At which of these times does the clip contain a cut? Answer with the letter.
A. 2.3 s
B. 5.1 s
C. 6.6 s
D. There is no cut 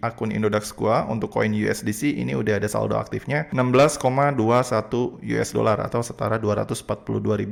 D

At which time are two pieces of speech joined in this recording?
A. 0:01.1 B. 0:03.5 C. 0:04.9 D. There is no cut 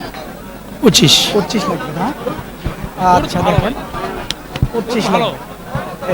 D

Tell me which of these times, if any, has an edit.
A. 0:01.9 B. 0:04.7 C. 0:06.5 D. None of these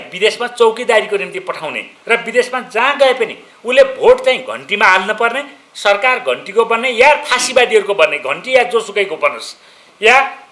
D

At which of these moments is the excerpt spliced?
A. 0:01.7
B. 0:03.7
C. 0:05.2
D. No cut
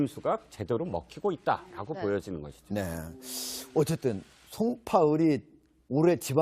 B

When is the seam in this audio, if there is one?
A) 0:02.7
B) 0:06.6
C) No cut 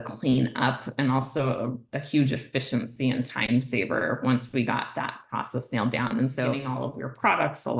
B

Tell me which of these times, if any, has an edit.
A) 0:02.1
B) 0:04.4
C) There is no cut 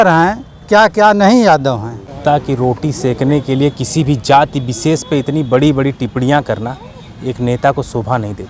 A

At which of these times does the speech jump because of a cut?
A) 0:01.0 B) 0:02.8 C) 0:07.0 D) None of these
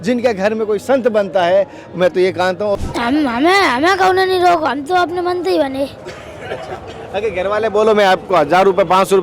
B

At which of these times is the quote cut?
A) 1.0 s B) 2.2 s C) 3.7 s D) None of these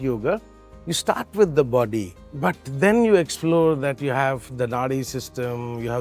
B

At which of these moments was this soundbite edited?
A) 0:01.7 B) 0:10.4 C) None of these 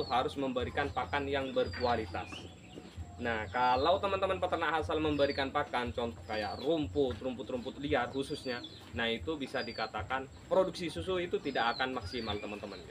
B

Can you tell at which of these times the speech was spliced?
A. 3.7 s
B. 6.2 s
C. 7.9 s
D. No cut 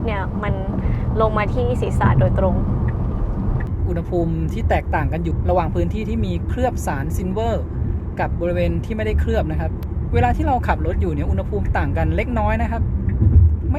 A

